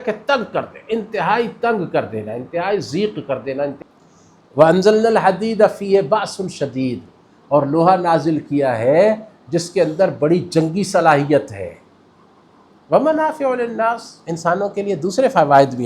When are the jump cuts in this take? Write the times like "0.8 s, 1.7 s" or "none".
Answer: 3.8 s